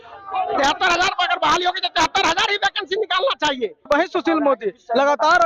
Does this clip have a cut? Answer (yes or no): yes